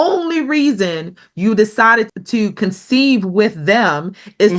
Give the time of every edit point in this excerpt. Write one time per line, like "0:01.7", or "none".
0:02.1